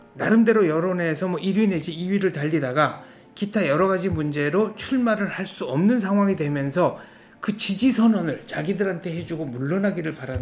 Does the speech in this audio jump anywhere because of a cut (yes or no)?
no